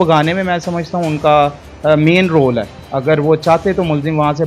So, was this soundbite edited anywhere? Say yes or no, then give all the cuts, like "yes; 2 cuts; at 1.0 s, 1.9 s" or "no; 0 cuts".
no; 0 cuts